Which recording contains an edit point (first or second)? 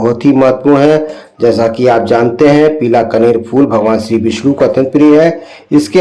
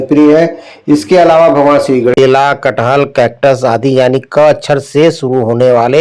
second